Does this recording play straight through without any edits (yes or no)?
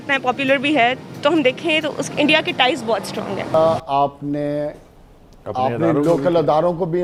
yes